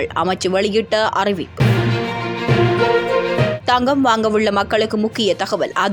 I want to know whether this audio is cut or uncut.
uncut